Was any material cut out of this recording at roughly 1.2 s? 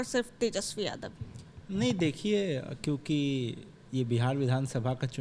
no; 0 cuts

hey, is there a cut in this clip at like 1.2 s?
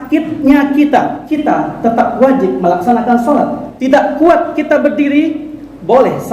yes; 2 cuts; at 1.2 s, 3.7 s

